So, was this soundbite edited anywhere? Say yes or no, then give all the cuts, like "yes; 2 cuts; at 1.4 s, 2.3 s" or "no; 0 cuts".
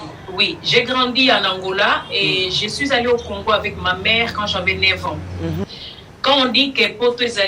yes; 1 cut; at 5.6 s